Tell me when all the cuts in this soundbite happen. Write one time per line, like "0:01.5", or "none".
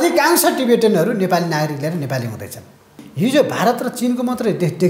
0:03.0